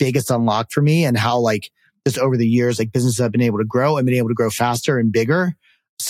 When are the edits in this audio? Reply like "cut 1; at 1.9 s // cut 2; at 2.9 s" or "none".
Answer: none